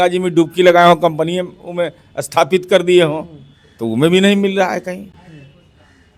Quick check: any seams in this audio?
no; 0 cuts

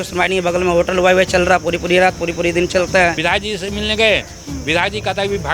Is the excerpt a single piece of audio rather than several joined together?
no; 1 cut; at 3.2 s

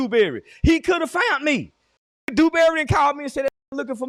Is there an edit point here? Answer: no; 0 cuts

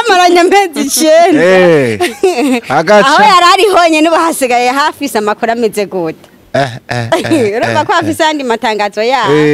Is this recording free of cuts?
yes; 0 cuts

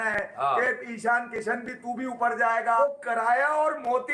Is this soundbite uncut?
no; 1 cut; at 2.8 s

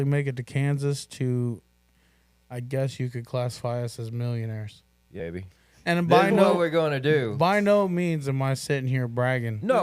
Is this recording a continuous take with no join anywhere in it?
no; 1 cut; at 5.2 s

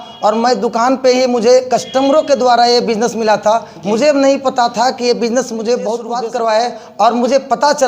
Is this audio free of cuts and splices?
no; 1 cut; at 6.2 s

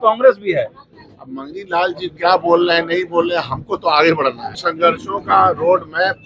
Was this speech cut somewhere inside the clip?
yes; 1 cut; at 4.5 s

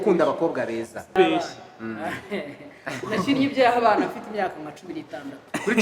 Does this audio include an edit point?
yes; 1 cut; at 1.1 s

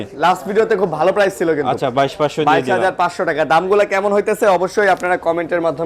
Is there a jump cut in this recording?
no; 0 cuts

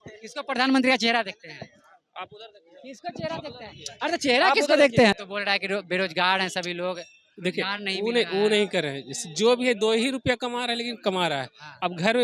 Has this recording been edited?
yes; 1 cut; at 5.1 s

